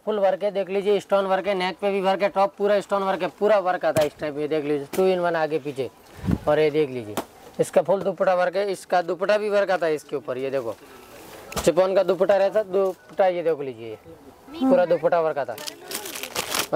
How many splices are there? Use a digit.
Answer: 0